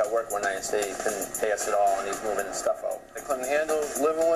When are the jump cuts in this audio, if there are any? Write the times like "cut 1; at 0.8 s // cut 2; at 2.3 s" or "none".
cut 1; at 1.3 s // cut 2; at 3.2 s